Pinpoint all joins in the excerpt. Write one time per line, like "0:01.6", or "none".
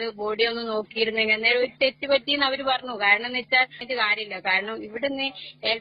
0:03.8